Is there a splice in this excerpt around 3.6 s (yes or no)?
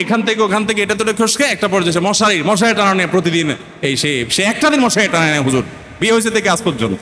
no